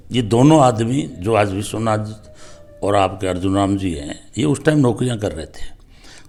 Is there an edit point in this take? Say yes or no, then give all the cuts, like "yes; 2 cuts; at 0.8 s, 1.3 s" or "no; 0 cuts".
no; 0 cuts